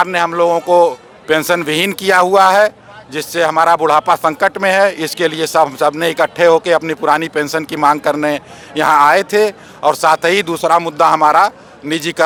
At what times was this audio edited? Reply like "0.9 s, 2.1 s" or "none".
none